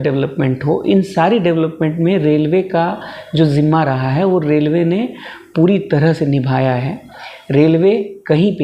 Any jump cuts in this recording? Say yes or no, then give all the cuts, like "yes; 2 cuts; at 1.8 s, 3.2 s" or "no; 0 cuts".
no; 0 cuts